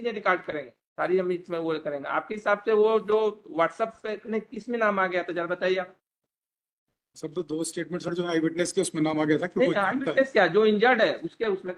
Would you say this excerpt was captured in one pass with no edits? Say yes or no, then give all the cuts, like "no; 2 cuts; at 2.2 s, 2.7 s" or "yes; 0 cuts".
yes; 0 cuts